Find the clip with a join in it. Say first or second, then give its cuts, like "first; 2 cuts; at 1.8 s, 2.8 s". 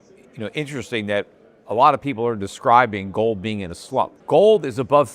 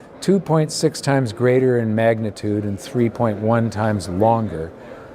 first; 1 cut; at 4.2 s